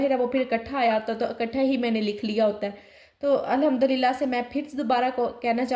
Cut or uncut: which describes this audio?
uncut